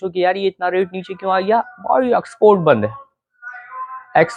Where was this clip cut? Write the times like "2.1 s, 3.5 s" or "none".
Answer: none